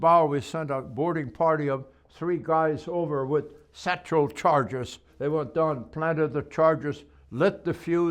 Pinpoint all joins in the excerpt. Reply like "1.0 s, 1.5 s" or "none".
5.1 s